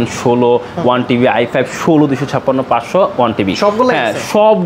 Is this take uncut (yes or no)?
yes